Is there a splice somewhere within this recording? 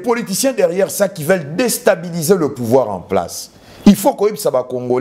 no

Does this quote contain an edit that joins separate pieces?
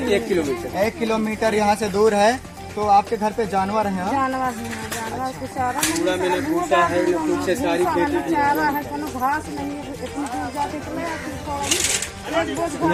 no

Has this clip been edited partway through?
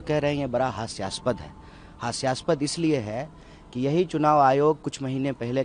no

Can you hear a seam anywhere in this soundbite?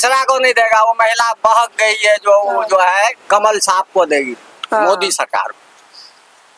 no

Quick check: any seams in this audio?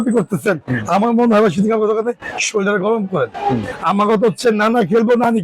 yes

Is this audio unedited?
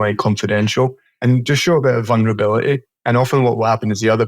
no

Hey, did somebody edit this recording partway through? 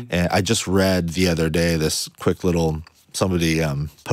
no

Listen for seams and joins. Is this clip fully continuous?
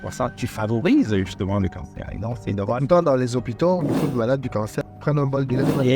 no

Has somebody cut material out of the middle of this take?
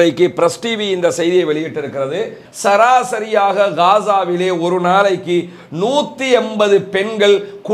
yes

